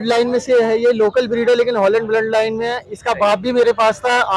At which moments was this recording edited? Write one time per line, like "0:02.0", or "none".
none

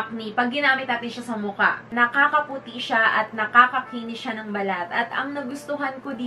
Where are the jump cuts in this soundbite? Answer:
0:01.9

